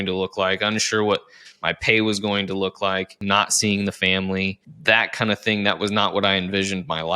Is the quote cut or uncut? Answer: cut